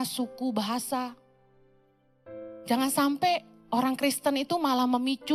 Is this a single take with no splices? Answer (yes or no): yes